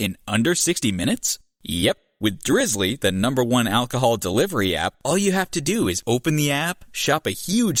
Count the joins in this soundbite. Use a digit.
0